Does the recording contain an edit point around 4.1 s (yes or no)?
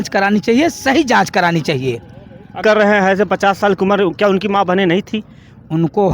no